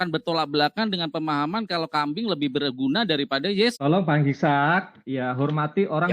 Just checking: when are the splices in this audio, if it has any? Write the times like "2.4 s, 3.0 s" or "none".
3.8 s